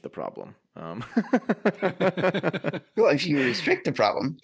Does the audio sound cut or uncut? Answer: uncut